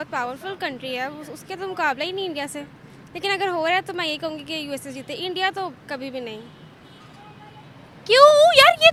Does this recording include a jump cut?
no; 0 cuts

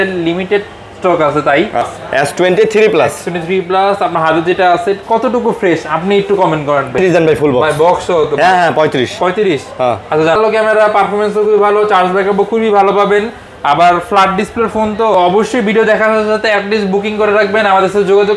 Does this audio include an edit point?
yes; 4 cuts; at 1.9 s, 7.0 s, 10.4 s, 15.1 s

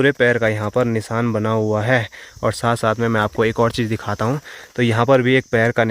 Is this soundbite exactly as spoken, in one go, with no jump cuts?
yes; 0 cuts

